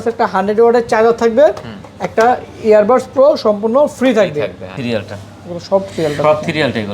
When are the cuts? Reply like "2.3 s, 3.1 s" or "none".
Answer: 4.8 s